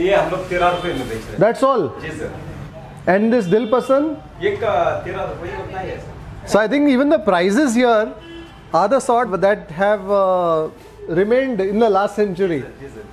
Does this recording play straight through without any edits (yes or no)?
no